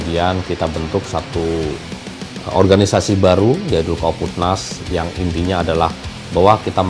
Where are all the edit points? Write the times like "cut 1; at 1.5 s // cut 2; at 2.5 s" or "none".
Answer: none